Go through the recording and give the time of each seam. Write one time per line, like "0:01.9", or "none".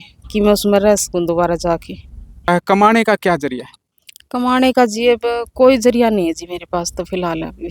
0:02.5